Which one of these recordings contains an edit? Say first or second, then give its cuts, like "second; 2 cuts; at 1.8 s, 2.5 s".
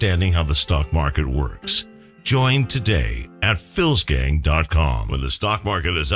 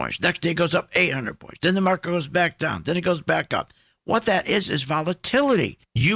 first; 1 cut; at 5.0 s